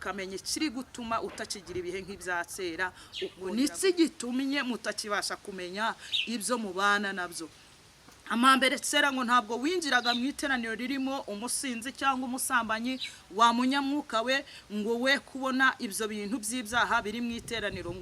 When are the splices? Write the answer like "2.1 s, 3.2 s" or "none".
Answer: 3.4 s